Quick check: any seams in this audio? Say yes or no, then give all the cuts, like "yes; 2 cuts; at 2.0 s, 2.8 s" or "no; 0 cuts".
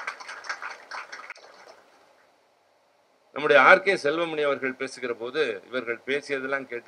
no; 0 cuts